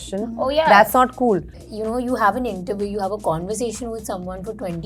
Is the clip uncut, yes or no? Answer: no